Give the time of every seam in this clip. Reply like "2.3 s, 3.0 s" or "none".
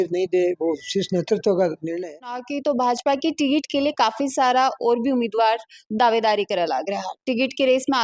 2.5 s